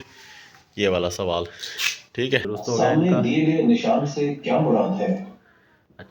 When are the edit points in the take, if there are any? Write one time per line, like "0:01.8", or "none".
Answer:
0:02.4

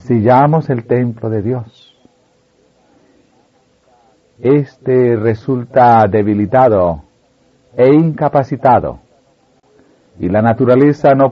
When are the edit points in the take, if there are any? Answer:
0:04.5

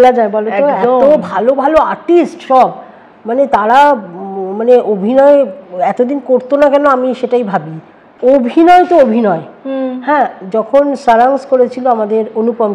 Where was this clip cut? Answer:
0:08.1

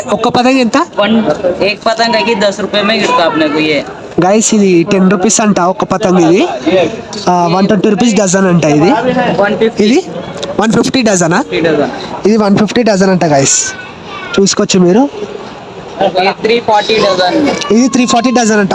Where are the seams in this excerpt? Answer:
none

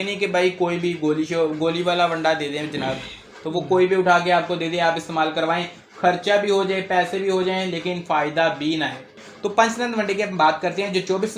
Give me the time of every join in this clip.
0:09.2

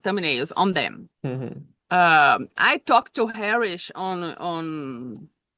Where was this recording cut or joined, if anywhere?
none

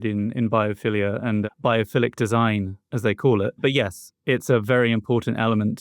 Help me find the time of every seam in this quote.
0:01.4
0:03.6

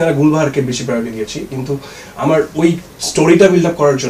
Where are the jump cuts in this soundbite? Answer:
none

